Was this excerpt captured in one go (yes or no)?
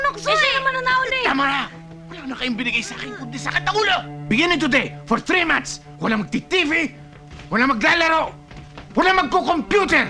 yes